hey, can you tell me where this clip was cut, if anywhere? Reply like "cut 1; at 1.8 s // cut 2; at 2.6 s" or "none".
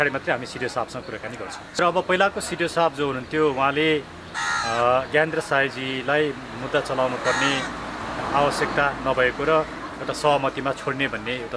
cut 1; at 1.8 s